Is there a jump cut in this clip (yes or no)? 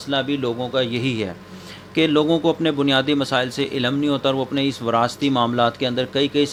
no